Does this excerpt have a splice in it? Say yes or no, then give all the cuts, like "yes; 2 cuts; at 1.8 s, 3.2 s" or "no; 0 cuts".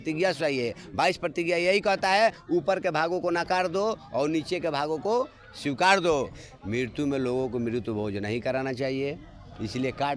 yes; 1 cut; at 6.3 s